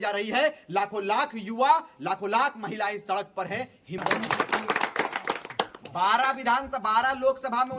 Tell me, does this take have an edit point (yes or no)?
yes